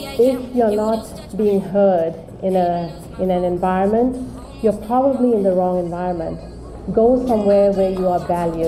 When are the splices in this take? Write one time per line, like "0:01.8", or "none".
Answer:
none